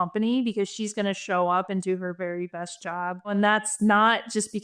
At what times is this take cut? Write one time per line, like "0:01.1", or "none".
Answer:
0:03.3